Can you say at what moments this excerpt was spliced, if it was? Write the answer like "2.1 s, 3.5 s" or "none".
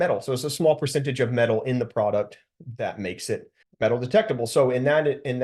3.6 s